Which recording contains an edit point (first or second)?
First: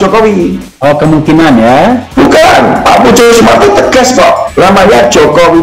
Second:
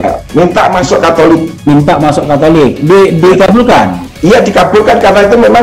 first